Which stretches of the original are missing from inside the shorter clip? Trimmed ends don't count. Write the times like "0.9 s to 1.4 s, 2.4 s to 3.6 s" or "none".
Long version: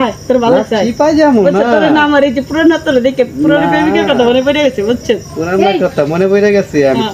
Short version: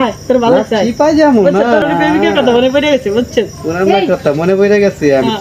1.8 s to 3.5 s